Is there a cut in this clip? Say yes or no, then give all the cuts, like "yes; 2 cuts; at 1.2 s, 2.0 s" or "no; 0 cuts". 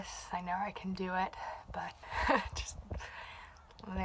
yes; 1 cut; at 2.0 s